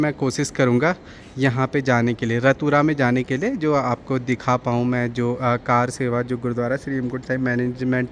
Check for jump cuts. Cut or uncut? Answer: uncut